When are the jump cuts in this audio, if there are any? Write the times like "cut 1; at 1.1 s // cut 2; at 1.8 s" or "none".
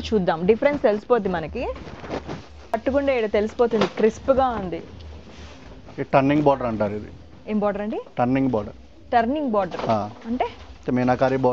cut 1; at 2.7 s